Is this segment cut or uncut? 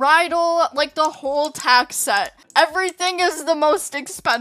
uncut